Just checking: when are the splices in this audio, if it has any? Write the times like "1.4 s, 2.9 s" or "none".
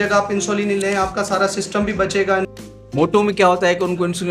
2.5 s